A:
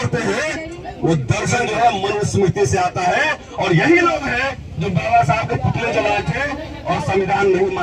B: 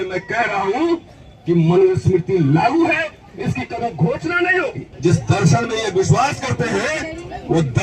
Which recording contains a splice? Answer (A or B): B